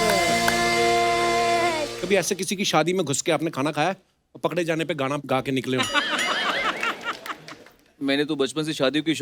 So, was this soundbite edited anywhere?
yes; 1 cut; at 1.9 s

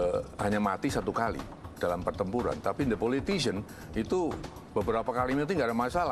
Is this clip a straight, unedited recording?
yes; 0 cuts

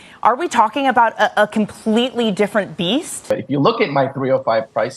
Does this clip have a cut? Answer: yes; 1 cut; at 3.3 s

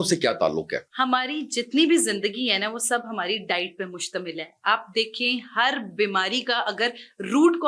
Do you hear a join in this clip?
no; 0 cuts

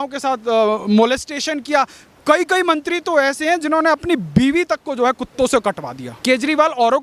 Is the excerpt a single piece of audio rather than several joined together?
no; 1 cut; at 6.1 s

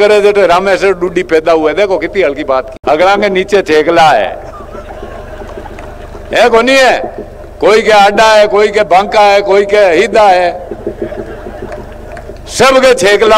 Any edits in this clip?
yes; 1 cut; at 2.7 s

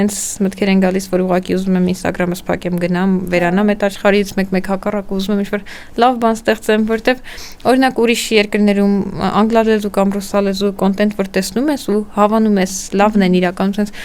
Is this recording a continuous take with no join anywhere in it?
yes; 0 cuts

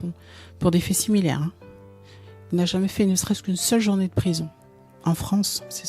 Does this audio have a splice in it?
no; 0 cuts

